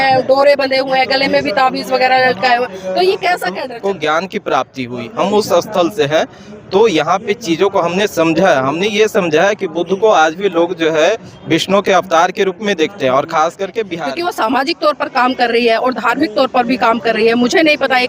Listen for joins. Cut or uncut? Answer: cut